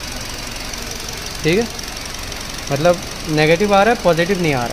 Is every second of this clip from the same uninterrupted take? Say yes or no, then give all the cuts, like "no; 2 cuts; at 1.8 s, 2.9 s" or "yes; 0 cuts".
yes; 0 cuts